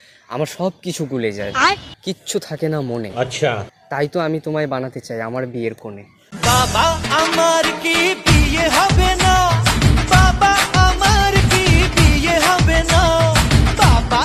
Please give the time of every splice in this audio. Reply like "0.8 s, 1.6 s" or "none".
none